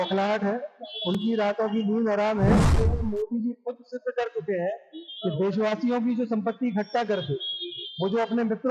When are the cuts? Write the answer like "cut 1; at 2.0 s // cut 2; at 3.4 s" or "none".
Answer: cut 1; at 2.7 s